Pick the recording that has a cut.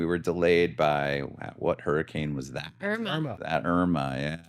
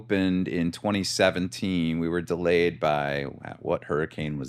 first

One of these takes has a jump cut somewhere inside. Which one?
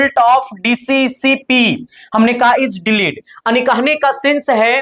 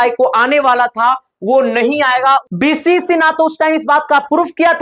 second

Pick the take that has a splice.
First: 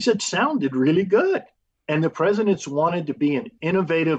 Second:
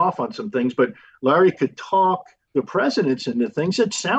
second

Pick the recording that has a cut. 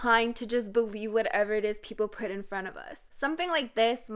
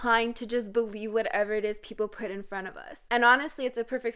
first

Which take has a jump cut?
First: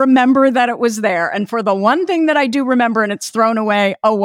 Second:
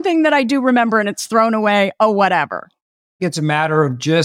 second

